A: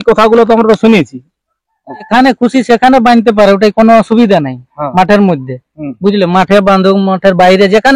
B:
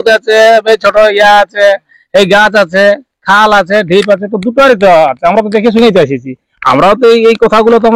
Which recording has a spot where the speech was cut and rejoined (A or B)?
A